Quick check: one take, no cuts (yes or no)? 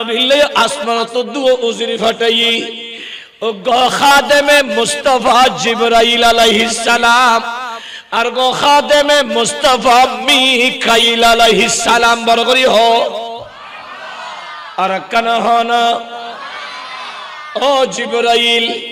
yes